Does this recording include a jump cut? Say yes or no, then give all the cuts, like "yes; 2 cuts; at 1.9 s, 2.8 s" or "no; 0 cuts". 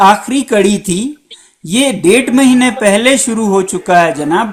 no; 0 cuts